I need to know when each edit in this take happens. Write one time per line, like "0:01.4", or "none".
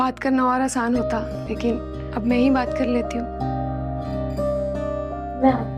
none

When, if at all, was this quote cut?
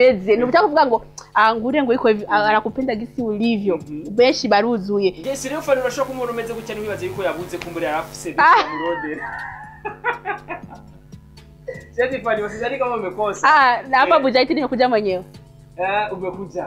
0:05.2

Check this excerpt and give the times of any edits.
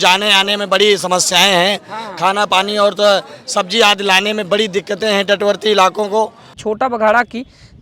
0:06.5

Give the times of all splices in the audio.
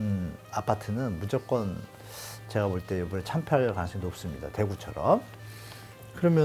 none

